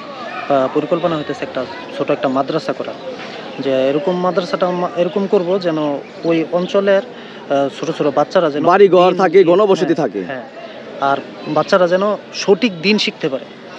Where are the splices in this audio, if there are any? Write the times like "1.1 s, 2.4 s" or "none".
none